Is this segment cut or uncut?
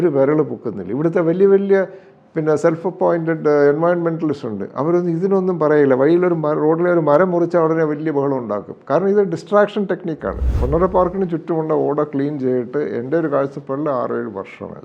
cut